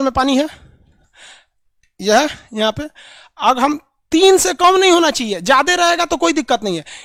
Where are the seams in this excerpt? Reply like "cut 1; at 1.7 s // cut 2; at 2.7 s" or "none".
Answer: none